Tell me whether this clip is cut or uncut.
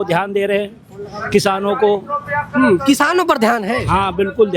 uncut